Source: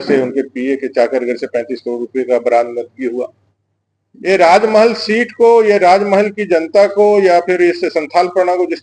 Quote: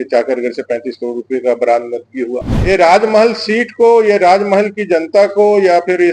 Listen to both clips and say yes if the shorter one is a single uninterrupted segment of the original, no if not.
no